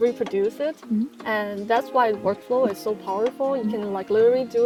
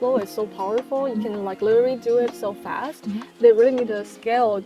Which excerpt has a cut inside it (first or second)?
second